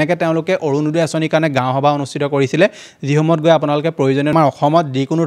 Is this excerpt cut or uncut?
cut